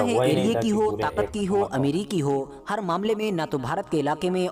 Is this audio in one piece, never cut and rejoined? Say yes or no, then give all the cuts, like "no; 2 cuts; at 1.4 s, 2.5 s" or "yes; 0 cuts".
yes; 0 cuts